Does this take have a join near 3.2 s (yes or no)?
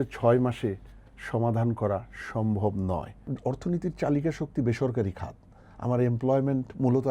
yes